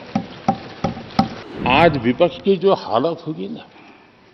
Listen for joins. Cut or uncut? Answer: cut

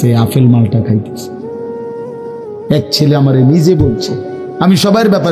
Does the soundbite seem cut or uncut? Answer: uncut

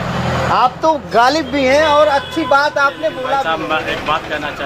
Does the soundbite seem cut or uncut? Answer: cut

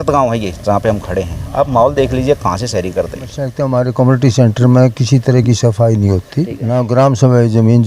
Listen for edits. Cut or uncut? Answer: cut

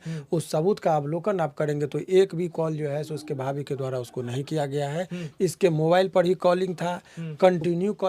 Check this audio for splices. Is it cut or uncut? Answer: uncut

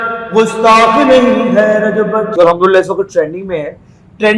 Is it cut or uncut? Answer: cut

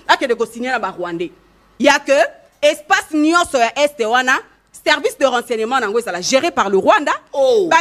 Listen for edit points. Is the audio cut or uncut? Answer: uncut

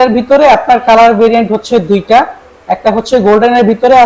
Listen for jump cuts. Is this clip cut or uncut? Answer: uncut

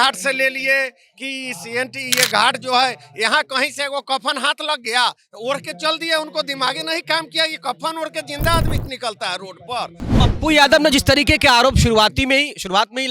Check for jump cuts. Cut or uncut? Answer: cut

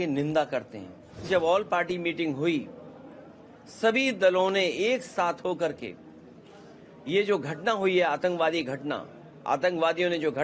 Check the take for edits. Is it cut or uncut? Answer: cut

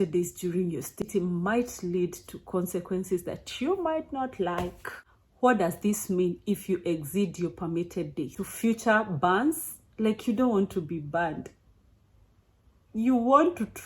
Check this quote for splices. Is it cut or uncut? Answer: cut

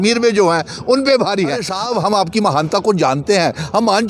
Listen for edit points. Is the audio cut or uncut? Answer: cut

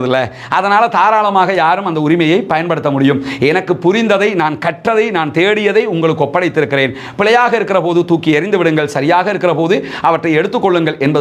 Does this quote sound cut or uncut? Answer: uncut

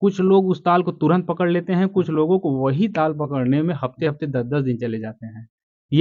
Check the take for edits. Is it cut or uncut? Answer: uncut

